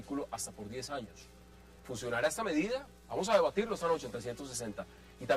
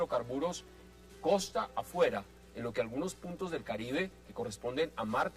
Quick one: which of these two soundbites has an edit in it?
second; 1 cut; at 3.6 s

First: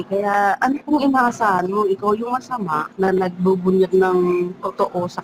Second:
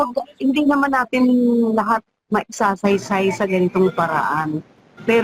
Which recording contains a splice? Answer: first; 1 cut; at 2.9 s

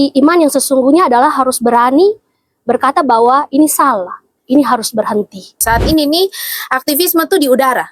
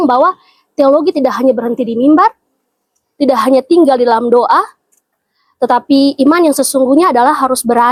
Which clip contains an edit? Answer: first; 1 cut; at 5.6 s

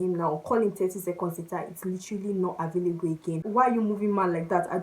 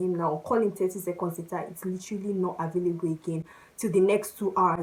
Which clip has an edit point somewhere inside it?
first; 1 cut; at 3.4 s

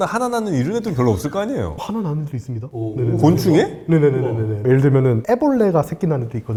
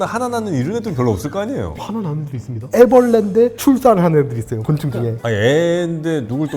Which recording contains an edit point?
second; 2 cuts; at 2.5 s, 5.1 s

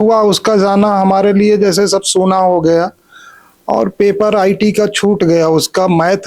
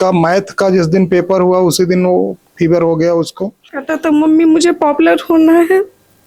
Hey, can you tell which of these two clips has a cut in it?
second; 1 cut; at 3.6 s

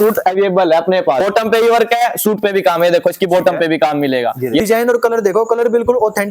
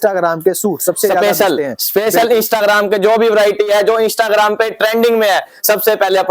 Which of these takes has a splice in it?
first; 2 cuts; at 1.3 s, 4.6 s

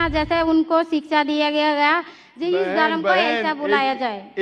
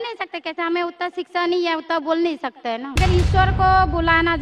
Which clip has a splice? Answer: second; 1 cut; at 3.0 s

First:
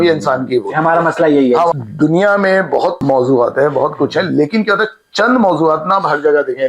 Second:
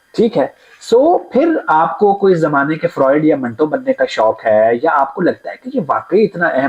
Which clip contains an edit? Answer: first; 2 cuts; at 1.7 s, 3.0 s

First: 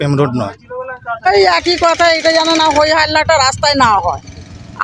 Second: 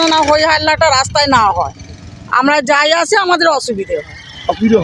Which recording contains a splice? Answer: first; 1 cut; at 1.3 s

